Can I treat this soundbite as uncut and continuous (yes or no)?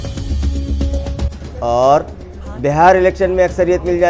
yes